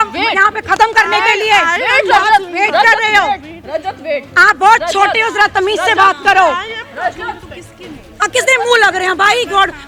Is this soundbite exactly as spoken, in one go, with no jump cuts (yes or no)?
yes